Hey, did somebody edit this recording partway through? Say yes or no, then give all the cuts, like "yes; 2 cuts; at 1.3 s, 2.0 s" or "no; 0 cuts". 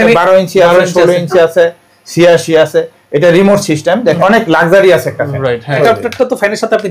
yes; 2 cuts; at 4.2 s, 5.8 s